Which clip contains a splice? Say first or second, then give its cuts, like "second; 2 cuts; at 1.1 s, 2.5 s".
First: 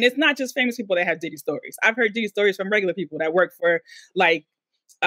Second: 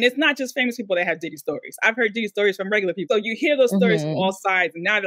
second; 1 cut; at 3.1 s